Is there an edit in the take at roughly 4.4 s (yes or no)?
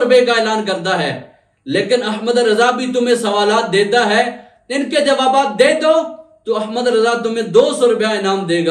no